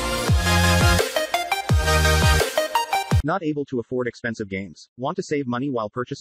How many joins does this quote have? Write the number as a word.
one